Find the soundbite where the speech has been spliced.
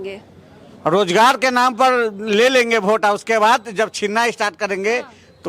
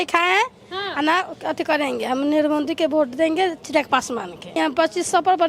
second; 1 cut; at 4.6 s

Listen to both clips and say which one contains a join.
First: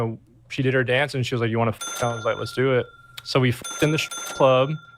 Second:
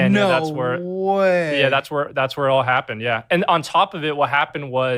first; 2 cuts; at 1.9 s, 3.6 s

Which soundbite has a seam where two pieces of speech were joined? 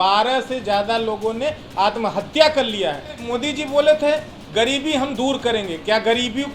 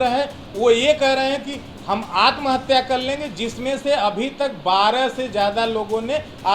first; 1 cut; at 3.3 s

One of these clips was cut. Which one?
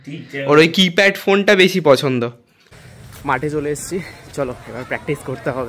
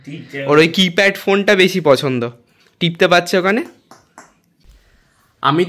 first; 1 cut; at 3.0 s

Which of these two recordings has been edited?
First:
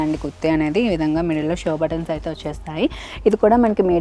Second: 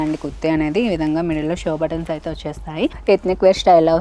second; 1 cut; at 3.0 s

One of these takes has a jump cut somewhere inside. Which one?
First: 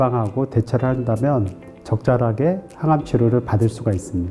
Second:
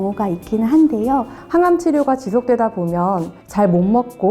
second; 1 cut; at 1.4 s

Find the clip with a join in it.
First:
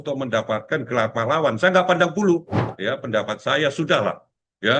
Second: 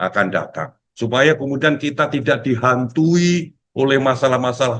first; 1 cut; at 2.7 s

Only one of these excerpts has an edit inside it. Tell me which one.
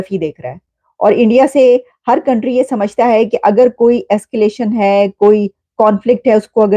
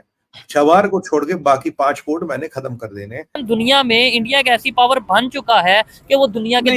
second; 1 cut; at 3.4 s

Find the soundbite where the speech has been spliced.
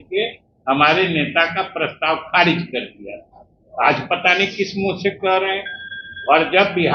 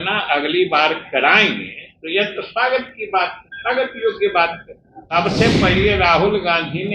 second; 1 cut; at 5.1 s

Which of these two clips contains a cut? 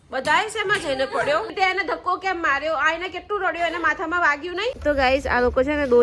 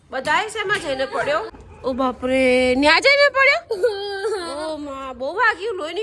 first; 2 cuts; at 1.5 s, 4.8 s

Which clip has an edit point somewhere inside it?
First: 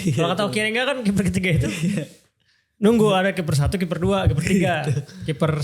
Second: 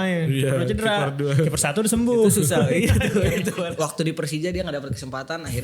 second; 1 cut; at 3.6 s

